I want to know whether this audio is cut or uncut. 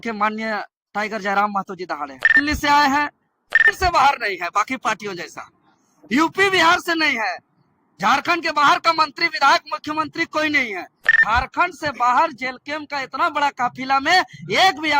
cut